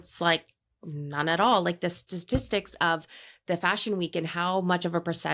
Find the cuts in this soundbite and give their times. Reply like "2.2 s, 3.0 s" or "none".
none